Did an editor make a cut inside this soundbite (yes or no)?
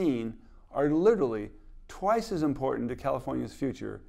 no